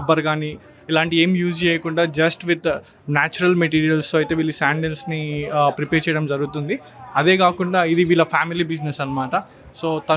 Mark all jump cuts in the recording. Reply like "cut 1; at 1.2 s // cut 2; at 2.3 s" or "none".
none